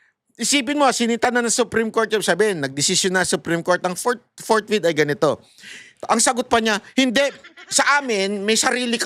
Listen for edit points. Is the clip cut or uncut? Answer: uncut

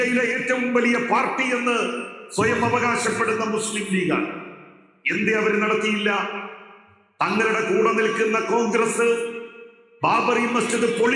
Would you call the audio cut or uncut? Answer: uncut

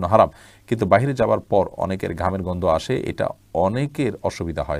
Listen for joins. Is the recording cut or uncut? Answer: uncut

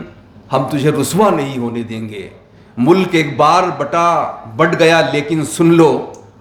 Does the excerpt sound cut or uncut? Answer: uncut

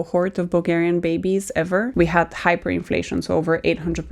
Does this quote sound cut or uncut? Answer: cut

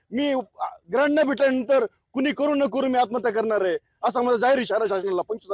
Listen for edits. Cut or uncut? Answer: uncut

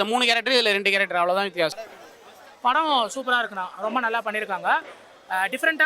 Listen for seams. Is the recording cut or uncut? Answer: cut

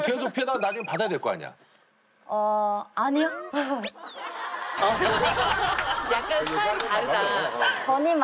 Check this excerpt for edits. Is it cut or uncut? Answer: uncut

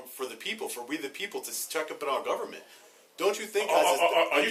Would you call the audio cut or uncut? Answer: uncut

